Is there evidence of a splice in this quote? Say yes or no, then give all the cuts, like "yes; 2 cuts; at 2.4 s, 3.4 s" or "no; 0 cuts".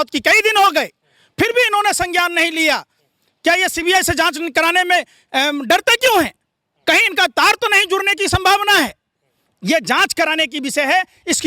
no; 0 cuts